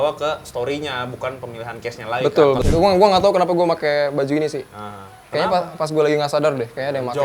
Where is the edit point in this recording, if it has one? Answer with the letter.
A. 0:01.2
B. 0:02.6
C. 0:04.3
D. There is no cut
B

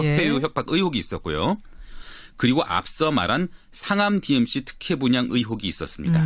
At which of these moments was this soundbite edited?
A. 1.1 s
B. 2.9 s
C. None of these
C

